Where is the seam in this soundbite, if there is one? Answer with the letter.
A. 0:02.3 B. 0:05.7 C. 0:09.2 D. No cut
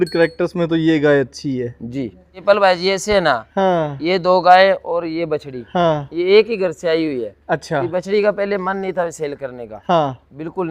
A